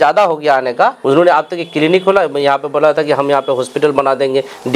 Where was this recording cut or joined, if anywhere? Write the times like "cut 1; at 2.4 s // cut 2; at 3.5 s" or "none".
cut 1; at 1.0 s